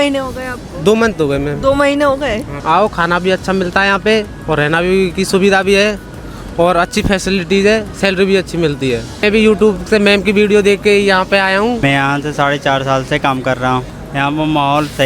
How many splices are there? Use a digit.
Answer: 4